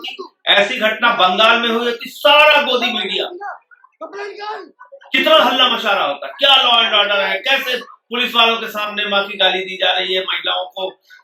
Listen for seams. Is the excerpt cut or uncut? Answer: uncut